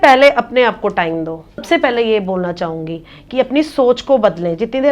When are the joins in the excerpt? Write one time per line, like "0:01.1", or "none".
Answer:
0:01.6

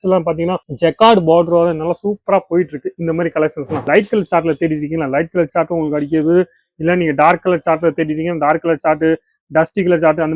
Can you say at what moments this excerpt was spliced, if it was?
0:03.9

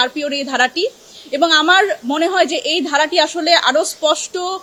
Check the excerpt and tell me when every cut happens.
none

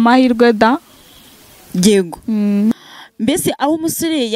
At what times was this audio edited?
0:02.7

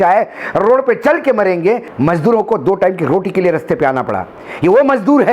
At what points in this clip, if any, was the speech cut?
0:01.9

